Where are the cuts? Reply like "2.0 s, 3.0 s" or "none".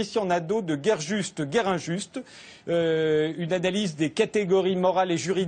2.2 s